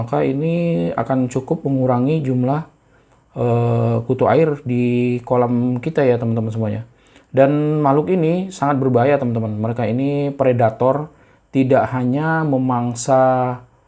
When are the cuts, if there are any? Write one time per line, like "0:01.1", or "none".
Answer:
none

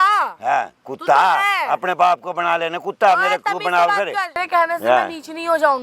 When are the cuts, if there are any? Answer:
0:04.4

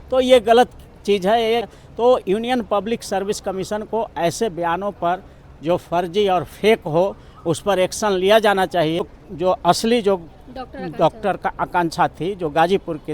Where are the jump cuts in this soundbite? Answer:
0:01.7
0:09.1

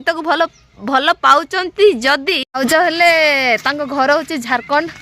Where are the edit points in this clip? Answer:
0:02.6

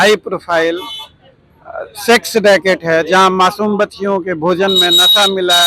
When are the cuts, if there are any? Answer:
none

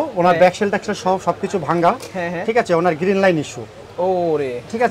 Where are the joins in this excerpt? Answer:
none

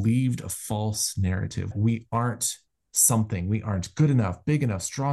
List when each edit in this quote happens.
0:01.7

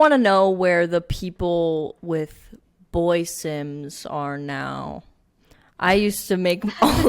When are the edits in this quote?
none

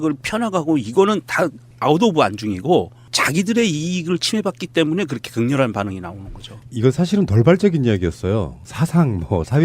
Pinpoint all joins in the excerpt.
0:03.5

